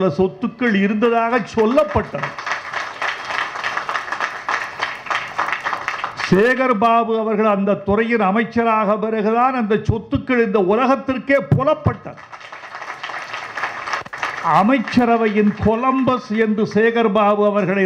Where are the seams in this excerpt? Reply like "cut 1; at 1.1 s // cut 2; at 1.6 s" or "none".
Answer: none